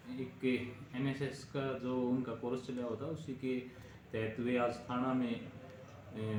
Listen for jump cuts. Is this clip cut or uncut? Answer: uncut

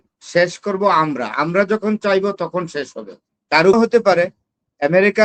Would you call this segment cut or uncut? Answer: cut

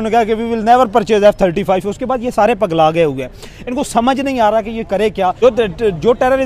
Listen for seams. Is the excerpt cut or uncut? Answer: cut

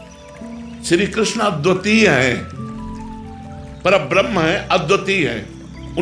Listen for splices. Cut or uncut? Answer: uncut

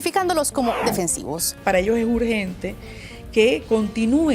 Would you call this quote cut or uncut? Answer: cut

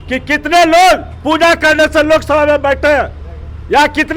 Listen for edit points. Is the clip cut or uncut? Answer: uncut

